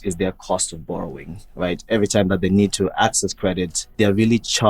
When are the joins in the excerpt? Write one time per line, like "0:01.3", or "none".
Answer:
0:03.8